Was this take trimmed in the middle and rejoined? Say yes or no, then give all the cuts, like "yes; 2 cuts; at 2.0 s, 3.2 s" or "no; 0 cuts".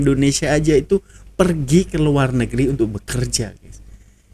no; 0 cuts